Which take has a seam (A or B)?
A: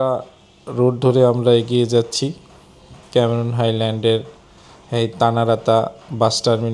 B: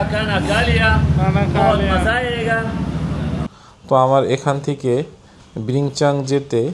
B